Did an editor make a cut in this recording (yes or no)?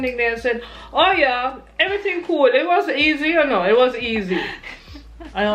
no